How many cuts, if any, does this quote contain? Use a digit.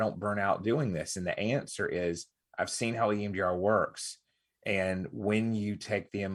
0